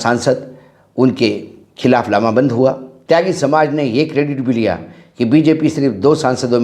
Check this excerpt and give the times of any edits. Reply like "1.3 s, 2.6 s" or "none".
2.9 s